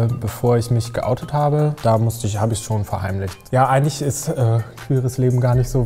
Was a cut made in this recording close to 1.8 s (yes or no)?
yes